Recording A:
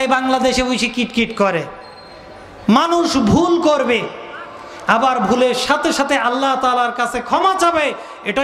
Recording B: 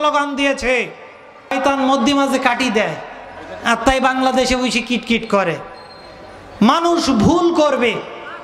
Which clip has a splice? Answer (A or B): B